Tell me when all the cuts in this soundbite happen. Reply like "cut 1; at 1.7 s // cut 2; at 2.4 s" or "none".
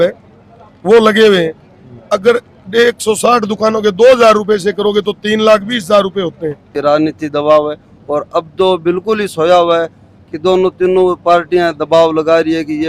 cut 1; at 6.8 s